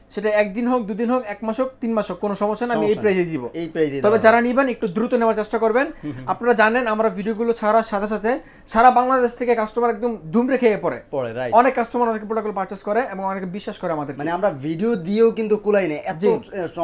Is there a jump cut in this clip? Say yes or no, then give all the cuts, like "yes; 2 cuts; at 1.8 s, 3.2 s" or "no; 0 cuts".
no; 0 cuts